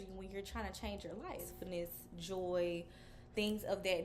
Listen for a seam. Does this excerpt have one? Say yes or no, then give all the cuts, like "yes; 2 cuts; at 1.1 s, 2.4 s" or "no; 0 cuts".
yes; 1 cut; at 1.5 s